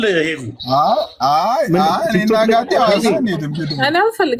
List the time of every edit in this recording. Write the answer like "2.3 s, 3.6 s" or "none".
none